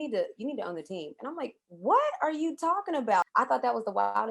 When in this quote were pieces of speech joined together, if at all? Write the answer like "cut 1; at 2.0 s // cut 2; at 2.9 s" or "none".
cut 1; at 3.2 s